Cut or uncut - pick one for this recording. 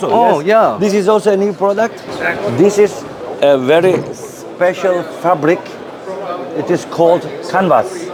uncut